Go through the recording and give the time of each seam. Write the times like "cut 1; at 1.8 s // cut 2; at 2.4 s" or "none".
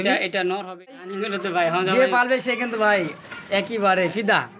cut 1; at 1.0 s